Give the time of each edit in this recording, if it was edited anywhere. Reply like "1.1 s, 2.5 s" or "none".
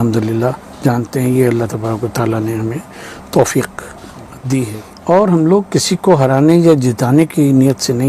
4.9 s